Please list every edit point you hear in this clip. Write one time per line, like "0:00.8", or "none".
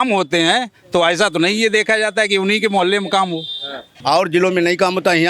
0:03.9